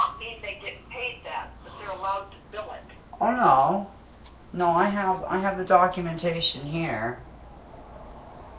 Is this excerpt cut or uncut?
cut